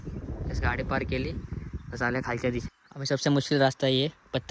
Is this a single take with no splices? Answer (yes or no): no